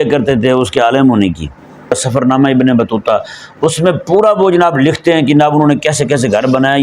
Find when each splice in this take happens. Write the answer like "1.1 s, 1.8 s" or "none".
2.0 s